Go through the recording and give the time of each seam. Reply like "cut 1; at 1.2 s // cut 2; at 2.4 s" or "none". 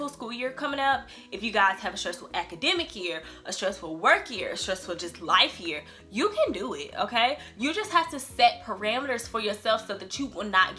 none